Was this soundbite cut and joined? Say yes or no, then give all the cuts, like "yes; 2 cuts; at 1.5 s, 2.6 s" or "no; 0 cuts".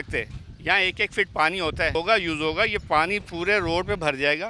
yes; 1 cut; at 1.9 s